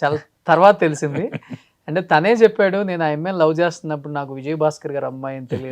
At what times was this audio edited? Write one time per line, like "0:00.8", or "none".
none